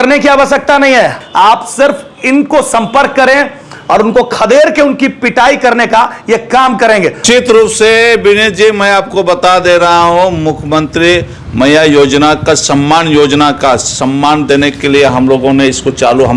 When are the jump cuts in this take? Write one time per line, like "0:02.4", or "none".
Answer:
0:07.3

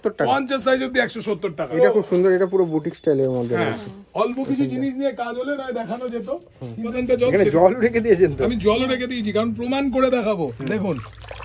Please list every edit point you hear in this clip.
0:01.7
0:06.9

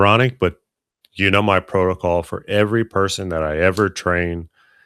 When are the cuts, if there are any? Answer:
none

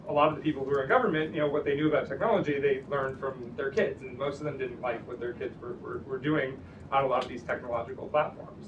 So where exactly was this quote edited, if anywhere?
0:02.8

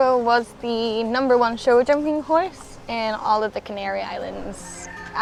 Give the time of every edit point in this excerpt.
none

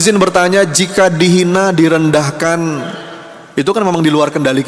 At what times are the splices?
none

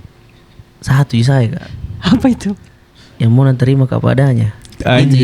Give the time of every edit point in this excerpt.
none

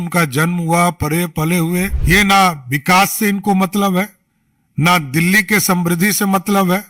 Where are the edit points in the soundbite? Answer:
0:02.0

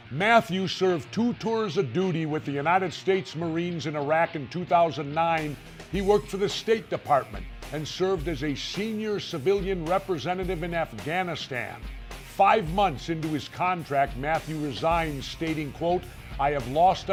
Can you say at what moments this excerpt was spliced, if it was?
none

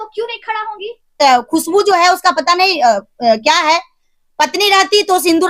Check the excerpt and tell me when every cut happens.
0:01.2

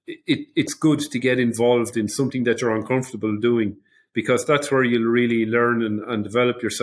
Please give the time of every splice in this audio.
none

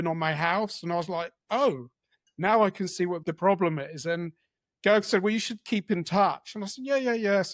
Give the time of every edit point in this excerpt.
0:03.2

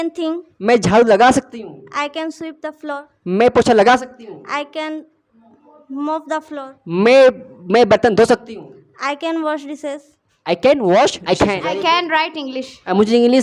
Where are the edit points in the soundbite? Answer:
0:11.2

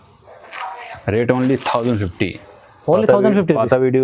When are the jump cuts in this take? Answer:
none

